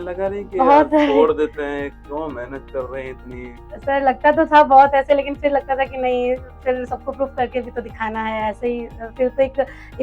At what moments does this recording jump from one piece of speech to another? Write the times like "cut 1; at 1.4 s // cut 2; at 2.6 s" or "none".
none